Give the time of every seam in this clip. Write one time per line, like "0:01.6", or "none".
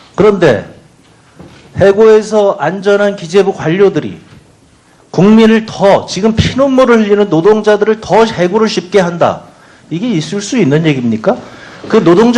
none